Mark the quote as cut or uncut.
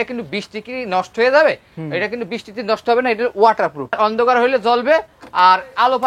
cut